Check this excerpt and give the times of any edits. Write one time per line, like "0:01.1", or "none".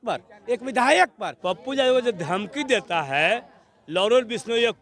0:01.3